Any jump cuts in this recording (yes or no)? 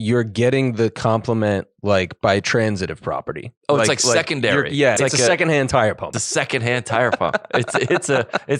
yes